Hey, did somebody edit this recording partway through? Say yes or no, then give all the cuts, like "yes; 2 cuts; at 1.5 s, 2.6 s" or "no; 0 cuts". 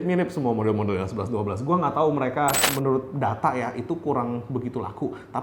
yes; 1 cut; at 2.7 s